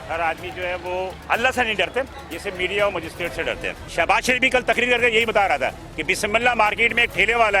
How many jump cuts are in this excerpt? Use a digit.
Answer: 3